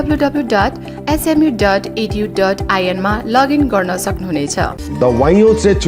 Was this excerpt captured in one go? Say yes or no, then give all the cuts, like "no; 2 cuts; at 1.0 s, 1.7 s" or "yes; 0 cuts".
no; 1 cut; at 4.8 s